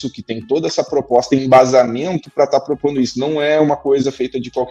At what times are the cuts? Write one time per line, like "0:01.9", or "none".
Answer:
none